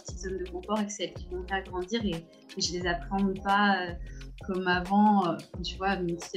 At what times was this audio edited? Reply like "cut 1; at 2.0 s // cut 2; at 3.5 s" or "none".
none